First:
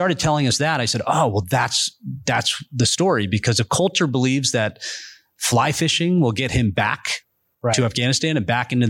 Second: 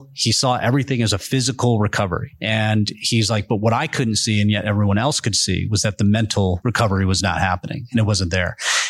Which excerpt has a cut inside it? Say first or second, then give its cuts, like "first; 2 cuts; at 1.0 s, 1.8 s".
second; 2 cuts; at 2.3 s, 6.6 s